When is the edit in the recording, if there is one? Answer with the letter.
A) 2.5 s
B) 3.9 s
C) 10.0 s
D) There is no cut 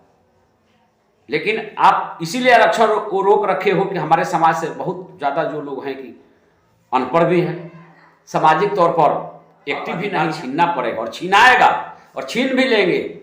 C